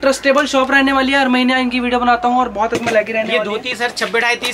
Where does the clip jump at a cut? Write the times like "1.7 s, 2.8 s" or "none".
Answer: 2.8 s